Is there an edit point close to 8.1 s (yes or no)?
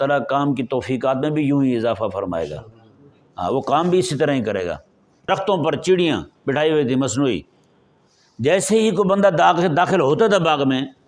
no